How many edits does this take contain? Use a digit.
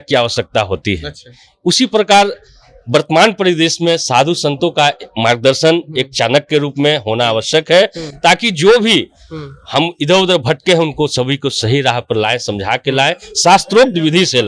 0